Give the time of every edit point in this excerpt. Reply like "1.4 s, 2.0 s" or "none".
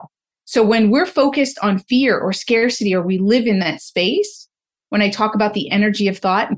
none